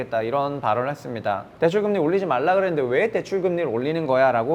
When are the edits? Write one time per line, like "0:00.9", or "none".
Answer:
0:01.5